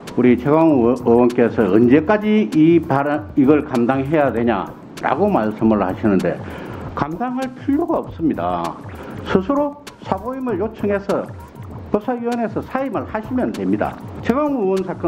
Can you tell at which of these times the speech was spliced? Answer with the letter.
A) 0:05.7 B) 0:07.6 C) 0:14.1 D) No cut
C